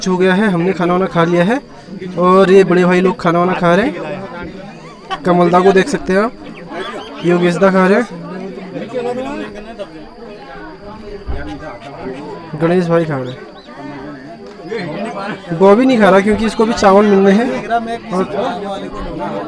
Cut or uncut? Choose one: uncut